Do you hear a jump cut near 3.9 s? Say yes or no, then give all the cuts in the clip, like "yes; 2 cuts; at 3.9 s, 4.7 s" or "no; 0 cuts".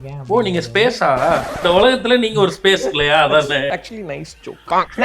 no; 1 cut; at 1.5 s